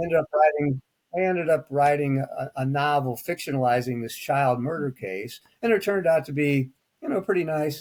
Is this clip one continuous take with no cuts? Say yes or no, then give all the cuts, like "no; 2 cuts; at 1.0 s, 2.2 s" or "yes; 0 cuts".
yes; 0 cuts